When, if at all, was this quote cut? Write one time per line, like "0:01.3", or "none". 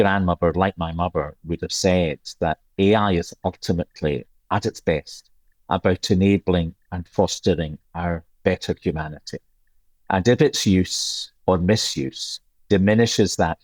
none